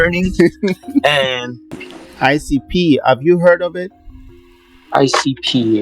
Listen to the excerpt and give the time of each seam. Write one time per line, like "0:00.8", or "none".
0:01.8